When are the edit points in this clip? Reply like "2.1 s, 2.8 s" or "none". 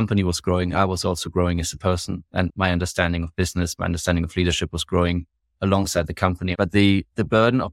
2.5 s, 6.5 s